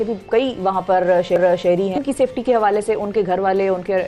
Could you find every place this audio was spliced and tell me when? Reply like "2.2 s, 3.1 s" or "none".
2.0 s

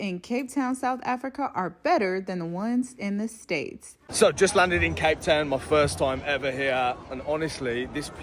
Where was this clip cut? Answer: 4.0 s

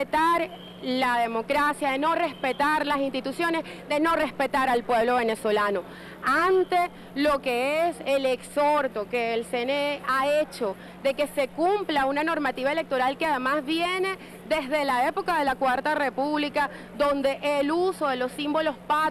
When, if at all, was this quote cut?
12.6 s

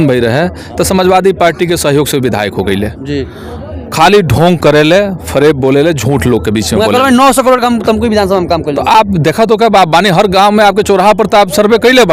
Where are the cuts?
none

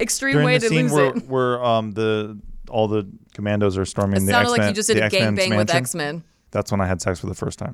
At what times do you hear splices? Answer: 3.2 s, 6.3 s

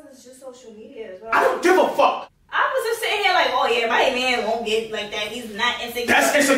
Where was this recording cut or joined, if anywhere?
2.2 s

